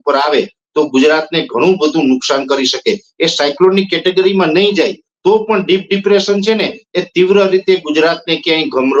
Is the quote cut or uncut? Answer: uncut